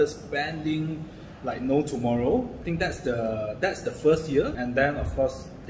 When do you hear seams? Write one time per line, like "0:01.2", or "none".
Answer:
0:02.6
0:04.5

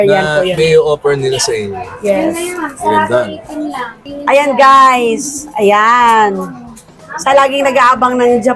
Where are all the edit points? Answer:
0:04.0

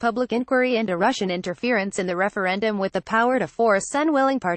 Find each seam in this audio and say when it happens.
0:01.3
0:02.0

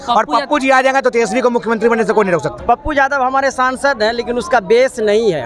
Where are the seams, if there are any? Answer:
0:02.5

